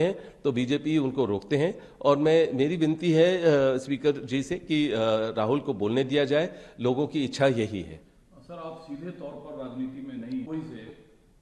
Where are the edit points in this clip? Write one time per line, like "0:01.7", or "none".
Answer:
none